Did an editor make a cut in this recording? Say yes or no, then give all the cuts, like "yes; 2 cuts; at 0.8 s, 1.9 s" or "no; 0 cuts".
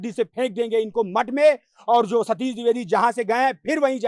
no; 0 cuts